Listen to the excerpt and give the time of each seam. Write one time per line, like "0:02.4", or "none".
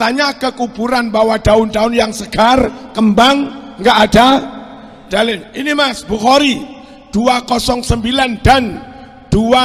none